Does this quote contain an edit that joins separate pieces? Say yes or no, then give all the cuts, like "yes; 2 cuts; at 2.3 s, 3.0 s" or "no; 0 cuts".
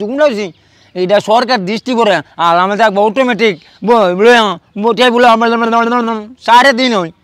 no; 0 cuts